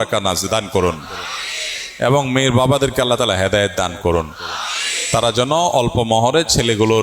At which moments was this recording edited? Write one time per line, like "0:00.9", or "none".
none